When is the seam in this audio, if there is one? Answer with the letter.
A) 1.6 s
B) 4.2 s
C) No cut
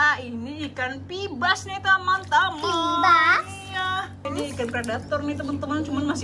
B